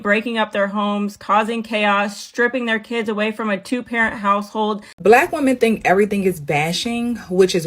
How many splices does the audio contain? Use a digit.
1